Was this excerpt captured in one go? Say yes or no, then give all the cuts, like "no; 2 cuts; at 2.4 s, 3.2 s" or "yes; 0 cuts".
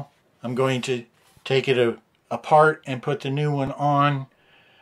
yes; 0 cuts